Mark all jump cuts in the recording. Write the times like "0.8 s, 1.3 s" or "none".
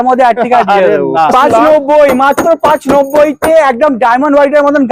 1.3 s